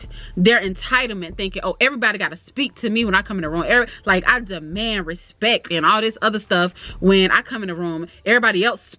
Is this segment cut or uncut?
uncut